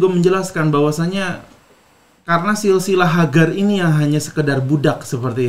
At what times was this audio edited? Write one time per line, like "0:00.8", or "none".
none